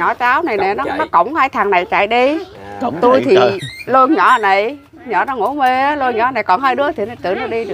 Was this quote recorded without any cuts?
yes; 0 cuts

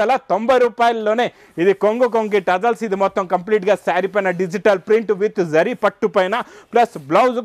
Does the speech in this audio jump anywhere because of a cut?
no; 0 cuts

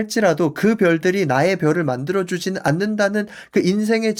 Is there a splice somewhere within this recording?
no; 0 cuts

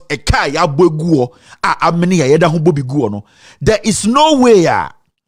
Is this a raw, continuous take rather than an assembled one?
yes; 0 cuts

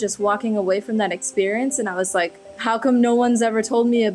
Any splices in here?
no; 0 cuts

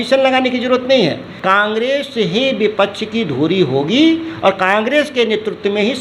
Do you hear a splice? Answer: yes; 1 cut; at 1.3 s

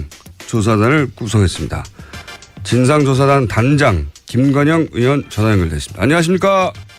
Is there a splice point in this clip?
no; 0 cuts

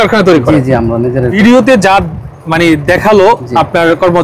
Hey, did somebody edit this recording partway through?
yes; 1 cut; at 1.4 s

